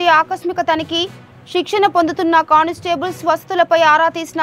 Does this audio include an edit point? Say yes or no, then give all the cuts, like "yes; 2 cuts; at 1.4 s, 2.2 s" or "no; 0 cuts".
no; 0 cuts